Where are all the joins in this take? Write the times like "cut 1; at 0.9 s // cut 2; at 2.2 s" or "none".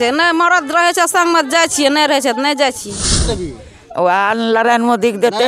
cut 1; at 3.2 s